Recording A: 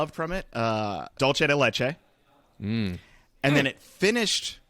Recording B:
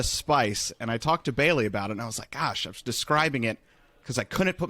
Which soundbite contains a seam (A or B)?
A